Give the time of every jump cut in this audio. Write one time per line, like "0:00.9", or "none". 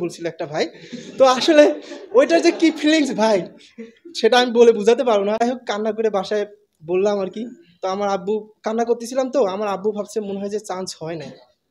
0:05.4

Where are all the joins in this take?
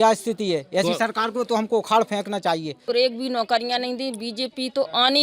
0:02.9

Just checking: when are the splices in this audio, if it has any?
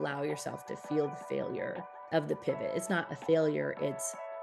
0:01.9

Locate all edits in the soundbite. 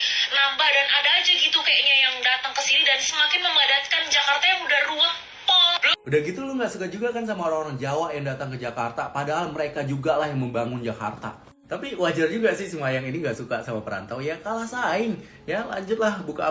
0:05.9

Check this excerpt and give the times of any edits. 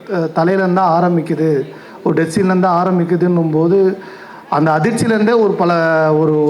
none

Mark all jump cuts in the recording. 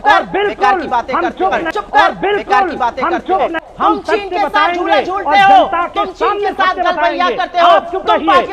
none

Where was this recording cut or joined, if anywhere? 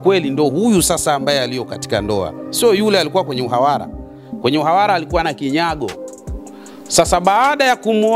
none

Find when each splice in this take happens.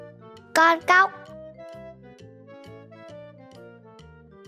none

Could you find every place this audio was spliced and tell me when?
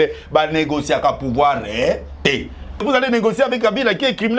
0:02.8

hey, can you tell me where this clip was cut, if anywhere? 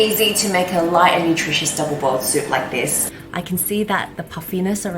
0:03.0

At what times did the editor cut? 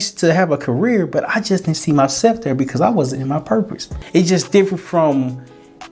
0:03.9

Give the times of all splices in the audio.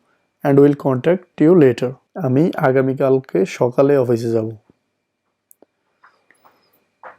0:01.3
0:02.1

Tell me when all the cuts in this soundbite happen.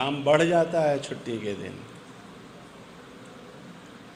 none

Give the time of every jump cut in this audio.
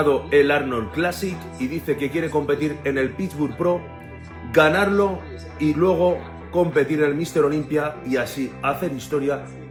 none

